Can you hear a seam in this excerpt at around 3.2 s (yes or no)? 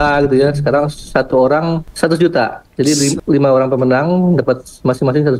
yes